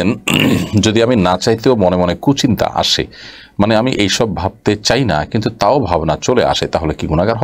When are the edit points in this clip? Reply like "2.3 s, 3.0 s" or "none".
none